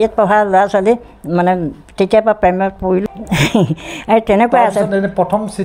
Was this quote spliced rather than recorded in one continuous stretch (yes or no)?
yes